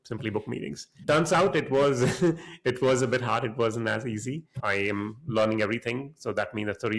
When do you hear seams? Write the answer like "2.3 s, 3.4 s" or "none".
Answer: 4.6 s